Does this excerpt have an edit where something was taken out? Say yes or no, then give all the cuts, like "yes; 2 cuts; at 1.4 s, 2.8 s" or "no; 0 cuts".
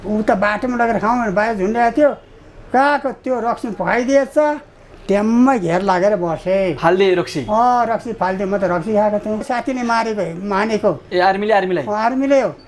yes; 1 cut; at 9.5 s